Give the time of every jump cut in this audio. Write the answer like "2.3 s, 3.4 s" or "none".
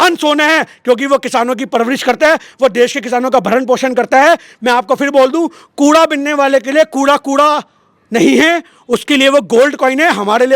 none

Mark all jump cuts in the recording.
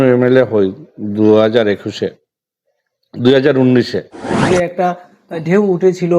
4.5 s

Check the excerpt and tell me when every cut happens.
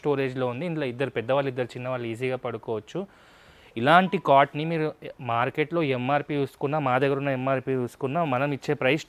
none

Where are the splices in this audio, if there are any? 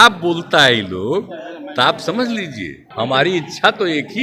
2.8 s

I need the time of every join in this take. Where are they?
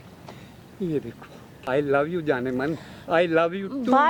none

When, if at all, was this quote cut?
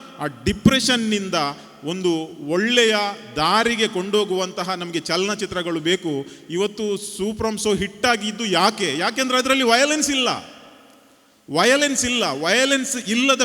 none

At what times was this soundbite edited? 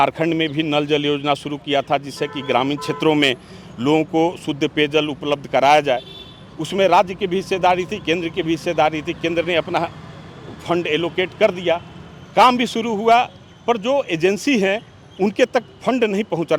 none

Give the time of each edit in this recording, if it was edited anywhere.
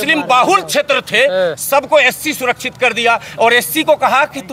none

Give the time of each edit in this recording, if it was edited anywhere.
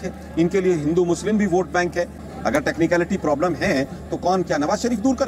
2.2 s

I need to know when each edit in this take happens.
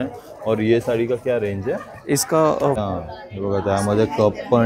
2.8 s

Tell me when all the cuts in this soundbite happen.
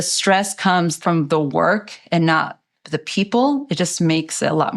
1.0 s

